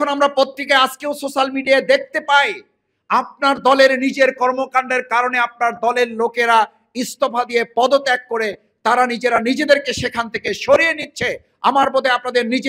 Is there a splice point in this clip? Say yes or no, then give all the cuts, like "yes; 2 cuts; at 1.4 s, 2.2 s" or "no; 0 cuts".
no; 0 cuts